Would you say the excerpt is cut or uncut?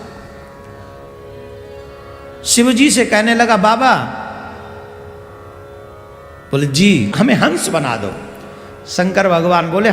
cut